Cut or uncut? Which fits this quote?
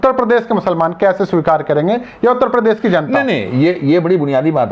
uncut